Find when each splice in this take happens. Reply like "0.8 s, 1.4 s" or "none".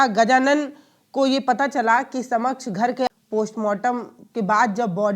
3.1 s